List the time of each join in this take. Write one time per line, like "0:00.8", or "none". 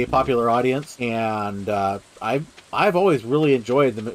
0:00.9